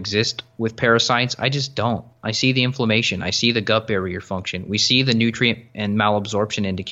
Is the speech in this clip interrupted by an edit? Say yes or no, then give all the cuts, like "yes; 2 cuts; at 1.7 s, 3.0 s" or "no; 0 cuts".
no; 0 cuts